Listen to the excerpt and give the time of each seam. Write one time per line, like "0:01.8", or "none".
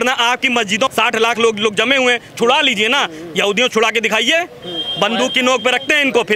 0:00.9

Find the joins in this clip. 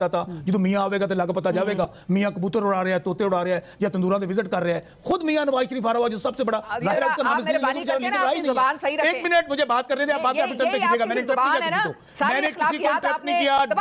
none

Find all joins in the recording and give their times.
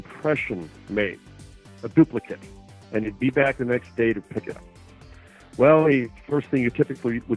none

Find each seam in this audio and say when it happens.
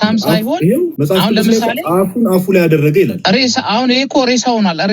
0:01.0
0:03.2

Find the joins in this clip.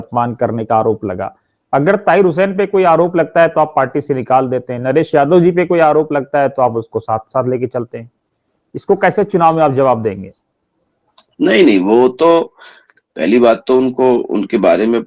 none

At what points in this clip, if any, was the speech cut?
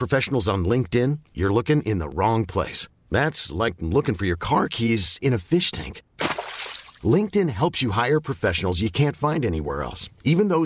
none

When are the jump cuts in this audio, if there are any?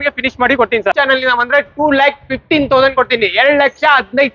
0:00.9

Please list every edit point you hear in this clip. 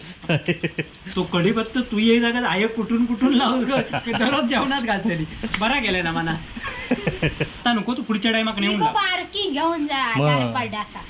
0:01.0
0:07.6

